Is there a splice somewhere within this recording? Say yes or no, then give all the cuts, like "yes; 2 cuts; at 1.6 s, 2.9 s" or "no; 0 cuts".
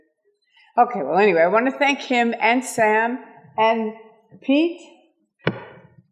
yes; 1 cut; at 4.4 s